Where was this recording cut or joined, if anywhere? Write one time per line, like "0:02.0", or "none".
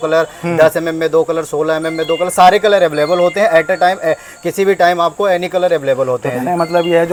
none